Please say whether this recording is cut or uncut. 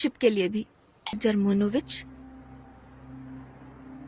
cut